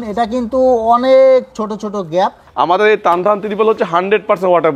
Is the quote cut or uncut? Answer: cut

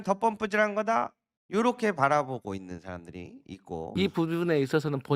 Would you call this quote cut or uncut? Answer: cut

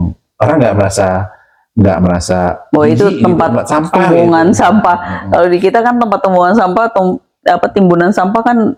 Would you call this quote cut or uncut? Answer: uncut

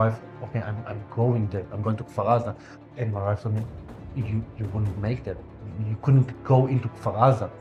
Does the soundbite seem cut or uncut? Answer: uncut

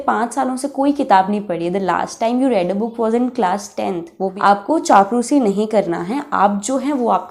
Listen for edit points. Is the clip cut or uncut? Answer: cut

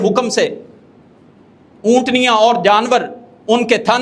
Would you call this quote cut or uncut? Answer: uncut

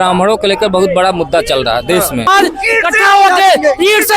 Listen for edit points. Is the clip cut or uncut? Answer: cut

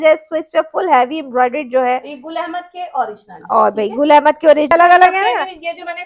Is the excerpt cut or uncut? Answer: cut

